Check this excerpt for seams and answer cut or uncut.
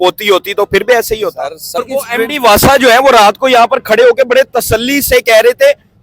cut